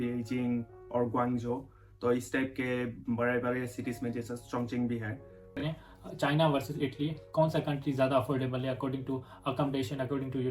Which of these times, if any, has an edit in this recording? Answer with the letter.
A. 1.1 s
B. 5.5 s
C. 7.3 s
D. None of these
B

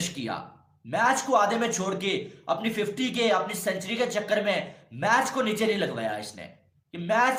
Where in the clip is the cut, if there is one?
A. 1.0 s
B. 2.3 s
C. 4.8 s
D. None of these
D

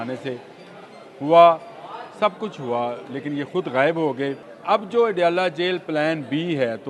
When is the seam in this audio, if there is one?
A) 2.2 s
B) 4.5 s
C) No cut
B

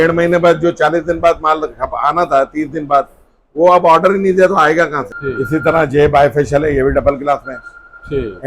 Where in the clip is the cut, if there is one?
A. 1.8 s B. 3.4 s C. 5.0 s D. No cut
C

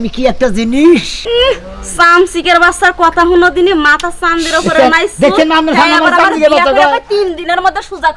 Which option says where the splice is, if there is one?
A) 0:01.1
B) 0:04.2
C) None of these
A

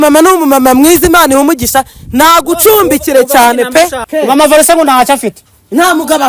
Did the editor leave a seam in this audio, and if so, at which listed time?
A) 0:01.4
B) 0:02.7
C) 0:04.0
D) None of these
C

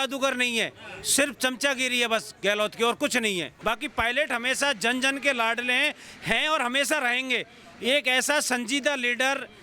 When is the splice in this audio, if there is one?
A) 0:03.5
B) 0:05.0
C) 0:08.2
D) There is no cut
A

